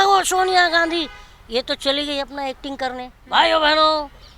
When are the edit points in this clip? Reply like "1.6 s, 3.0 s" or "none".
3.1 s